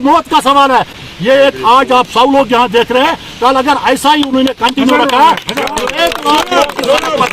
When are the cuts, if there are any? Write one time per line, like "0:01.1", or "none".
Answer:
0:01.0